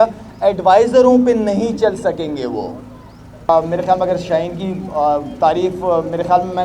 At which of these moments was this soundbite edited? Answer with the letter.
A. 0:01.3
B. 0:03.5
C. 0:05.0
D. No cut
B